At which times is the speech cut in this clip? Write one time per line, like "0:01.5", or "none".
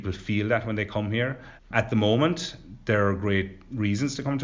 0:01.7